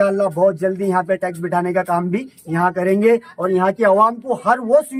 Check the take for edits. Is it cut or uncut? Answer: uncut